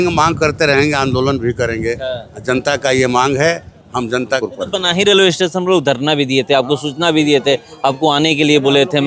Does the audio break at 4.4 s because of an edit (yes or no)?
yes